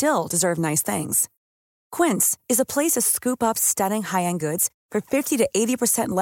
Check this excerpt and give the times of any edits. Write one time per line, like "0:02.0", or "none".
none